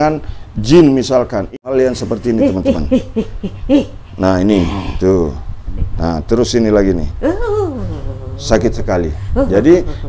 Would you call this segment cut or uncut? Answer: cut